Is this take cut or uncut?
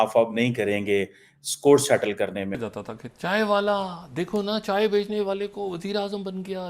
cut